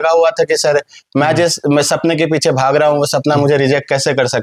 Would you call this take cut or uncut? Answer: uncut